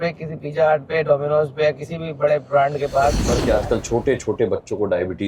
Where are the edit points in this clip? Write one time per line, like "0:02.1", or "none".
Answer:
0:03.3